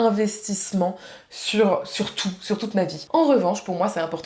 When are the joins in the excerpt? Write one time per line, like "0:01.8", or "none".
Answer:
0:03.0